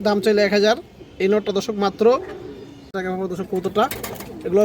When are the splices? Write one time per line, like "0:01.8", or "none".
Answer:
0:02.9